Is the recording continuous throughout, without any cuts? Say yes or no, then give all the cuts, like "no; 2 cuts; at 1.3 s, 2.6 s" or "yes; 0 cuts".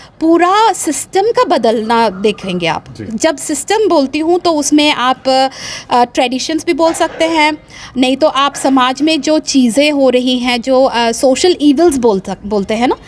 yes; 0 cuts